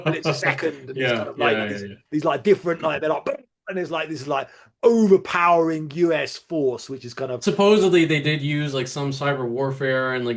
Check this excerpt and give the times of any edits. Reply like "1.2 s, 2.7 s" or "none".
none